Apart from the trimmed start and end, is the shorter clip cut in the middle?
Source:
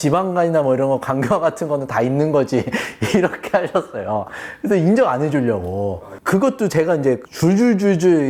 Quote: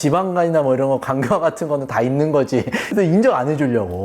yes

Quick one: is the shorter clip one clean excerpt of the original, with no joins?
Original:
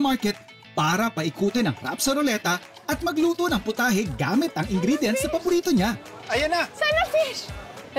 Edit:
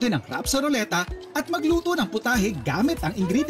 yes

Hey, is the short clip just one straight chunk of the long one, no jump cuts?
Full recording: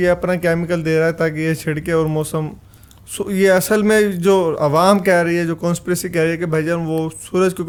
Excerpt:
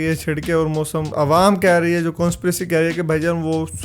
no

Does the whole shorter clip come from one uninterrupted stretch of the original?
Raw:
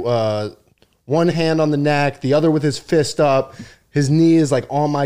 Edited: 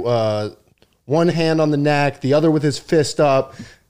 yes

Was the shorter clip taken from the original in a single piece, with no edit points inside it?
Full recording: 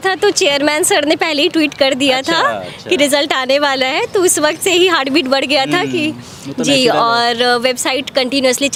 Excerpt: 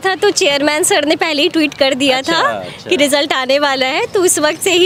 yes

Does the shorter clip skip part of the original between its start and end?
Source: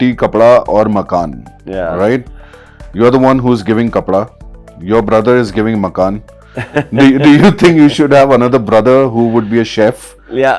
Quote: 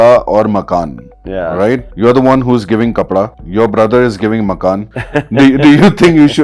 yes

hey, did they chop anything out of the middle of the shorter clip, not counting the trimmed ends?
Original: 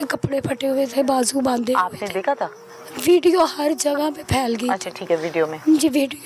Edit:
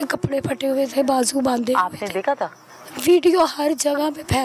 no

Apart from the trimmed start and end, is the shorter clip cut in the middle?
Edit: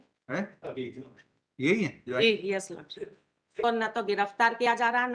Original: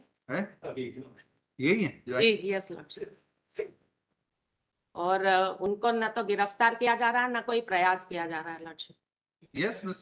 yes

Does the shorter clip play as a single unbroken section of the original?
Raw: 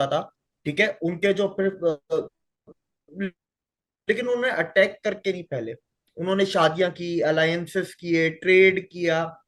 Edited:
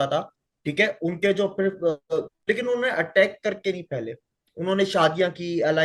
no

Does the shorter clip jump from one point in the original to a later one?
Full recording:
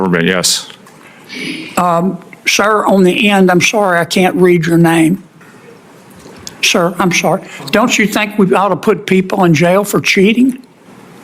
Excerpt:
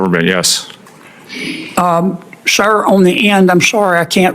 no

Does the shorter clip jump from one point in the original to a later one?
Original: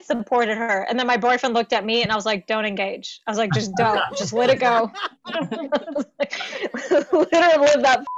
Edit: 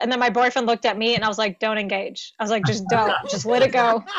no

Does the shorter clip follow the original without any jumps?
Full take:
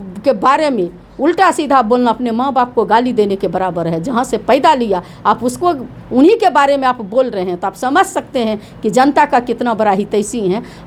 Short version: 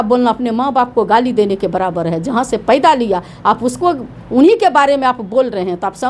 yes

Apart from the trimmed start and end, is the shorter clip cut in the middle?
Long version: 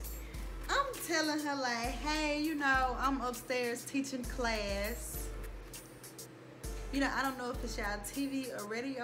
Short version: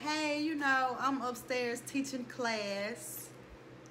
no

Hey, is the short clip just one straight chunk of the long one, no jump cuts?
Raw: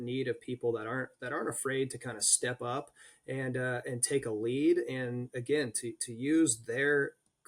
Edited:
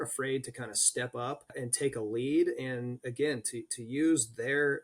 no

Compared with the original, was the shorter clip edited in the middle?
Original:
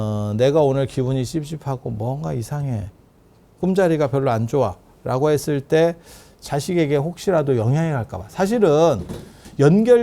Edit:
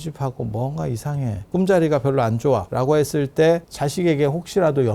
yes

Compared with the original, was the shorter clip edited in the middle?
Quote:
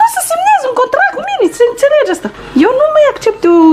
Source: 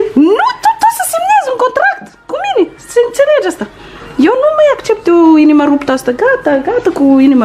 yes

